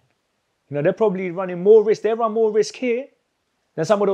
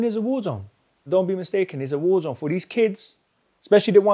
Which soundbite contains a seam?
second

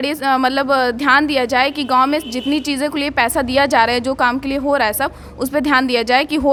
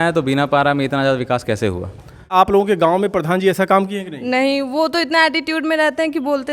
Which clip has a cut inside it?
second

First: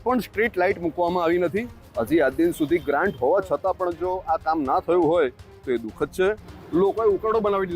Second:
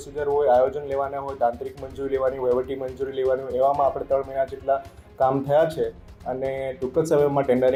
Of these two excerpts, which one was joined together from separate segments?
first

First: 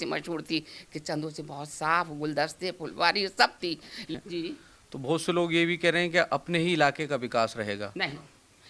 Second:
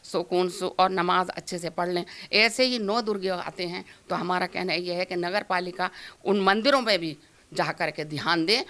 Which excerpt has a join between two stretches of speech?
first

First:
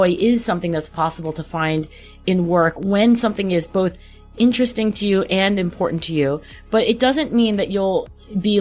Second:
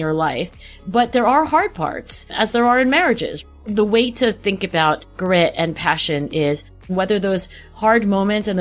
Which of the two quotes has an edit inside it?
second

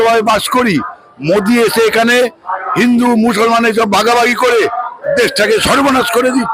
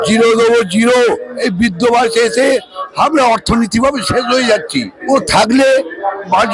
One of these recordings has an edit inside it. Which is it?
second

